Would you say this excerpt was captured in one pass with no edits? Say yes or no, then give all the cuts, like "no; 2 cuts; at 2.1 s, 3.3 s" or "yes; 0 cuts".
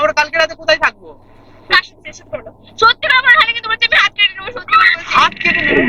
no; 1 cut; at 1.7 s